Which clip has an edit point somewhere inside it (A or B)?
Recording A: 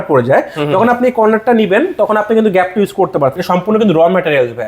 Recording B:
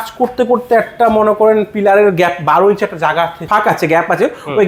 A